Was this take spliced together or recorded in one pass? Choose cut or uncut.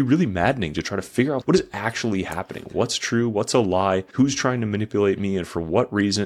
cut